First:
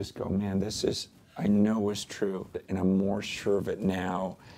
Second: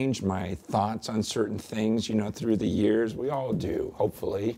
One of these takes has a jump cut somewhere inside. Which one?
first; 1 cut; at 2.6 s

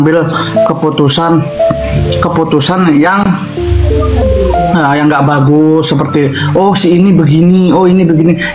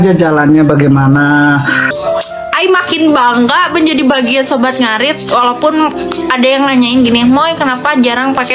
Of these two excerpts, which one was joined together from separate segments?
second; 1 cut; at 1.9 s

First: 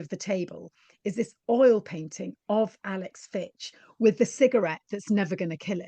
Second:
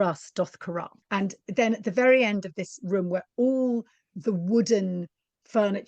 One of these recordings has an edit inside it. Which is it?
second; 1 cut; at 0.9 s

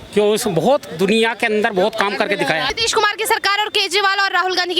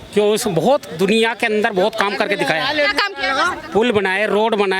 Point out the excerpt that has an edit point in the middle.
first; 1 cut; at 2.7 s

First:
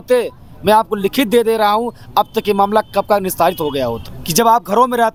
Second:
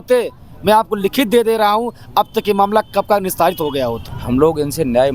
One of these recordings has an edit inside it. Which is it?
second; 1 cut; at 4.1 s

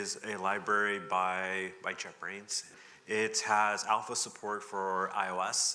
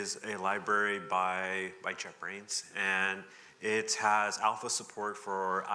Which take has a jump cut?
first; 1 cut; at 2.7 s

